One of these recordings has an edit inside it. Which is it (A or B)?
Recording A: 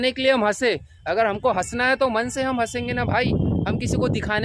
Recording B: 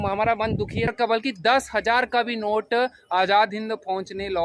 B